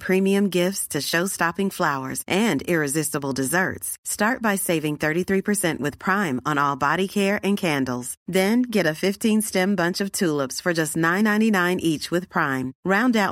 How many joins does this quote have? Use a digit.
0